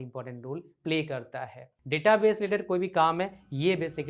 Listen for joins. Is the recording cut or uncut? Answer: cut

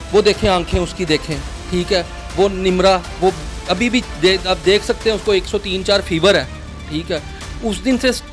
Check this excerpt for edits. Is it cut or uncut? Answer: uncut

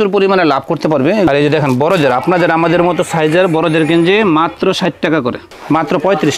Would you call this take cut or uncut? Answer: cut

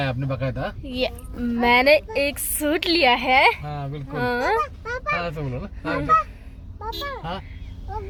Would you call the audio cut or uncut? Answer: uncut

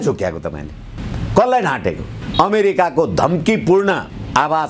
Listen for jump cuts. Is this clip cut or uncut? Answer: cut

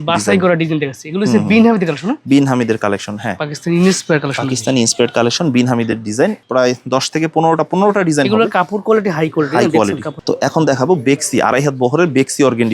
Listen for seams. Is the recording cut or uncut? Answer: cut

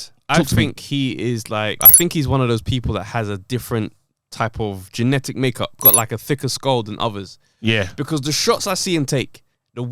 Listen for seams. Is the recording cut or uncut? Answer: cut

